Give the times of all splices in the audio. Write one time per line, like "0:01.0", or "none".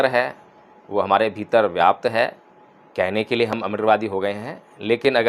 none